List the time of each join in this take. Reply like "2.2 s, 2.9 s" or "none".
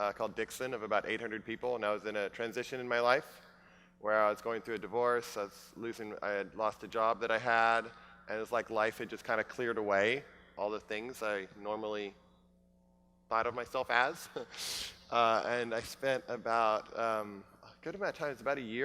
6.9 s